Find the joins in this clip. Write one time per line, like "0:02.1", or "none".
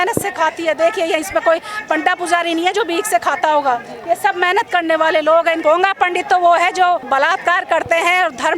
0:05.6
0:07.0